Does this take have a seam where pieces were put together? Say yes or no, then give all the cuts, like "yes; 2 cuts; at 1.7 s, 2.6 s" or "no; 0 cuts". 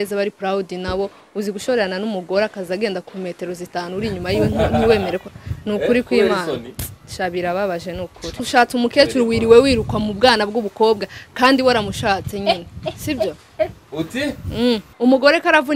yes; 2 cuts; at 8.4 s, 14.9 s